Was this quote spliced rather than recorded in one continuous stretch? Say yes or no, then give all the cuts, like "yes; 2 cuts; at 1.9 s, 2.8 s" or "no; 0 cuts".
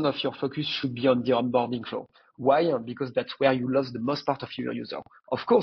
no; 0 cuts